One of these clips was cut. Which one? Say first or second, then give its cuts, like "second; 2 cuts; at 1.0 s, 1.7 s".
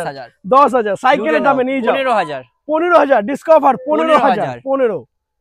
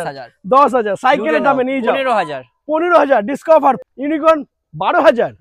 second; 1 cut; at 3.8 s